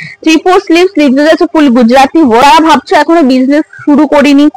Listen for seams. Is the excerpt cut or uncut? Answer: cut